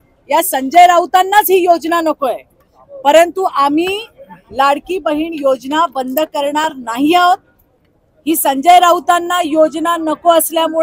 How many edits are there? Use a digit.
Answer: 0